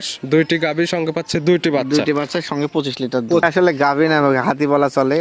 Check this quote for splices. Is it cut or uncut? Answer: cut